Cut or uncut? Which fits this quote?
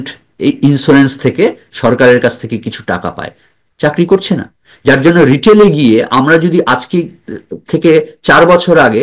uncut